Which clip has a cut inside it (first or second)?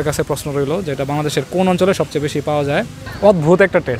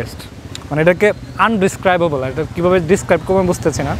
first